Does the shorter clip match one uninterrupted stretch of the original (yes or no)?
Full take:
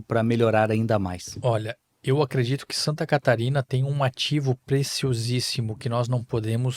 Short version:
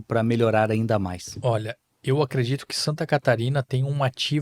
yes